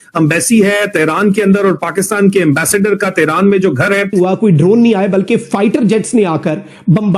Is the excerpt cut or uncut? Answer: cut